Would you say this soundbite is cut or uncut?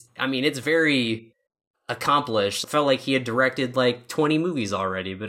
cut